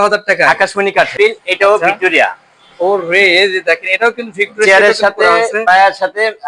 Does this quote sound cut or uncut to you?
cut